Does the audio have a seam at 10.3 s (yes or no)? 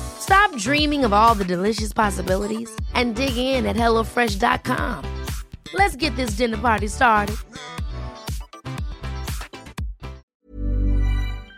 yes